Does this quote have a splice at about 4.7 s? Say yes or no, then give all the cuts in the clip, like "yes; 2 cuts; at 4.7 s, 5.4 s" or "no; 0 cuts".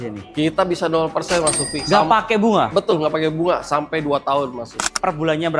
yes; 1 cut; at 4.7 s